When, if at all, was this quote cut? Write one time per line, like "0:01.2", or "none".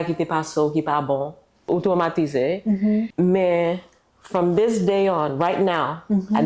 0:01.7
0:03.1